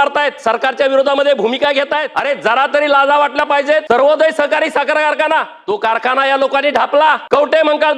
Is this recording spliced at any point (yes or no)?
yes